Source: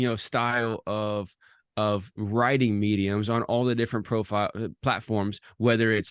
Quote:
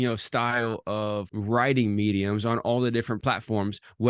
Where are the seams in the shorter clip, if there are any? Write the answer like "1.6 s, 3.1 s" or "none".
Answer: 1.3 s, 3.2 s